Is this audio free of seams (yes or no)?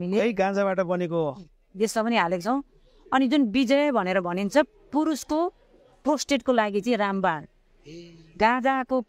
yes